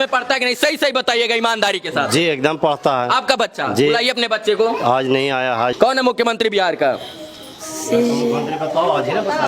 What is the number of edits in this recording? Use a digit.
1